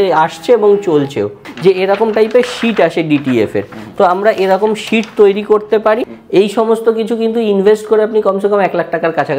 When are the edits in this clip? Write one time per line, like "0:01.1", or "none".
0:01.5
0:06.1